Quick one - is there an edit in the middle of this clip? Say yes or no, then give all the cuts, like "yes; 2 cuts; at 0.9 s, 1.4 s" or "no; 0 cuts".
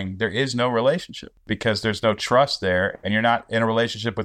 yes; 1 cut; at 1.4 s